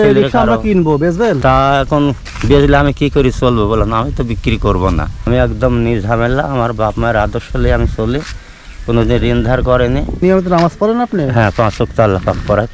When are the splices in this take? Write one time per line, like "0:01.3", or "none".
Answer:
0:01.4
0:05.3
0:10.1